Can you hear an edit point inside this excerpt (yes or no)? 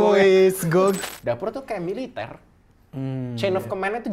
yes